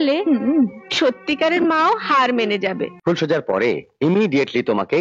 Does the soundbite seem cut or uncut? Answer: cut